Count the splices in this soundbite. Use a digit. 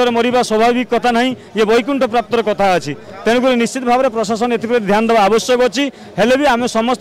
0